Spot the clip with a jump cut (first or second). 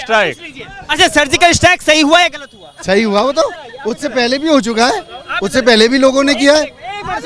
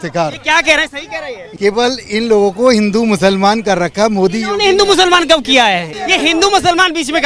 second